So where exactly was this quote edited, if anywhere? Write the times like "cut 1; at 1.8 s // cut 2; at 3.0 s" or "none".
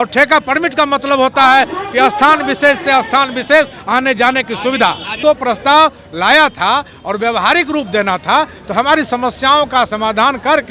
cut 1; at 5.1 s